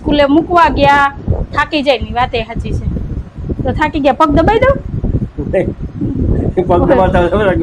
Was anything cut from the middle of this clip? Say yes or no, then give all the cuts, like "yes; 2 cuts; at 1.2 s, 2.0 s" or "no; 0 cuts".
no; 0 cuts